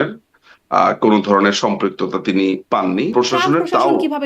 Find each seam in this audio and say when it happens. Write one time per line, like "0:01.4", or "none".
0:03.1